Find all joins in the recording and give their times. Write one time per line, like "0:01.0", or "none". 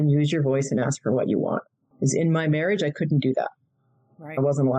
0:01.8

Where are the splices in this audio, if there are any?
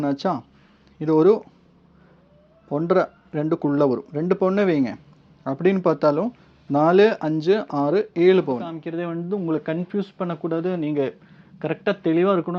0:08.8

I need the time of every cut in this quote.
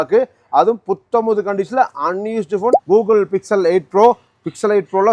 0:02.8

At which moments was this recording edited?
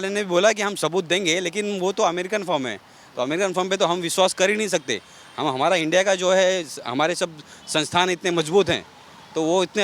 none

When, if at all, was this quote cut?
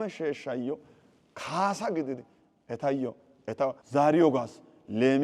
0:03.8

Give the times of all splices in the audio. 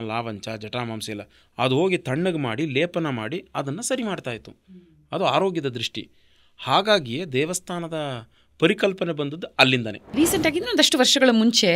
0:10.1

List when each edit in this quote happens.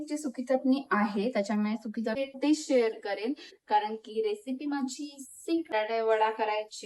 0:02.2
0:05.7

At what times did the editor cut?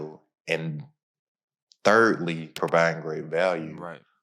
0:02.5

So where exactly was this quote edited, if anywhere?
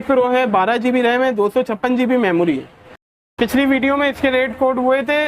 0:03.2

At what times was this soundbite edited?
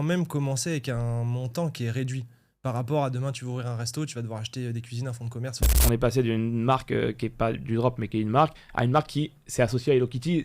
0:05.7

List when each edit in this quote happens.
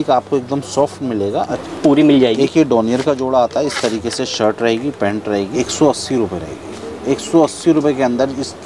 0:01.6
0:05.5

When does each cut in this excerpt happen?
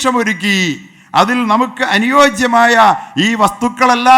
none

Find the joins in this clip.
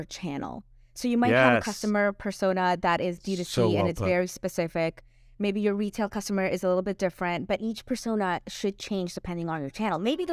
none

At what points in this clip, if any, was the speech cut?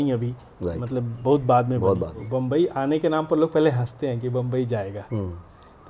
0:02.2

